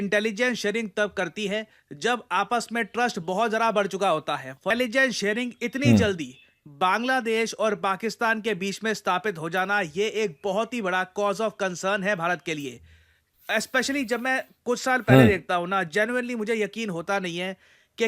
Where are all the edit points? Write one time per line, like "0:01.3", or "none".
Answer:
0:04.7